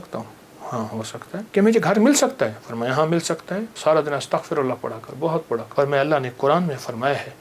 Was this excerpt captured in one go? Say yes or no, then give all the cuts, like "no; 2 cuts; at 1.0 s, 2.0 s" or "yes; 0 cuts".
no; 3 cuts; at 1.5 s, 3.7 s, 5.7 s